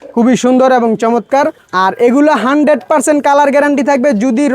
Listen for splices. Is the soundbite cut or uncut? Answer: cut